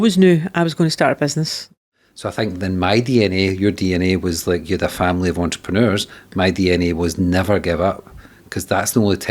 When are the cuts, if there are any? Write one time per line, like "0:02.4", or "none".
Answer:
0:01.8